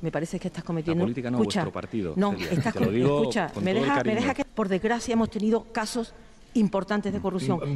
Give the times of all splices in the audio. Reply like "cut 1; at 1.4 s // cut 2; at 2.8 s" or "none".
none